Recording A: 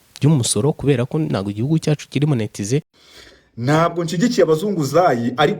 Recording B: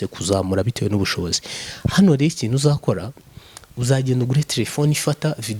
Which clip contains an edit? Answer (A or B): A